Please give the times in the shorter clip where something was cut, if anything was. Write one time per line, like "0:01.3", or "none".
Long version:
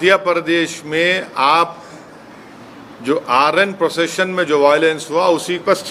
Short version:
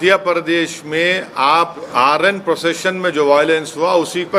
0:01.9